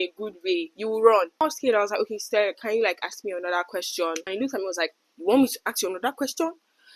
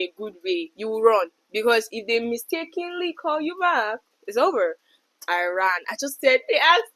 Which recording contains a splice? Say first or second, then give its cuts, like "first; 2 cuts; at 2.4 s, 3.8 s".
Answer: first; 2 cuts; at 1.4 s, 4.2 s